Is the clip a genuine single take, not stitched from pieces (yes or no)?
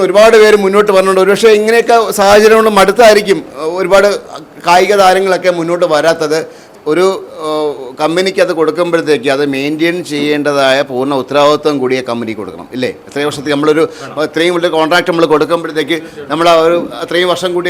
no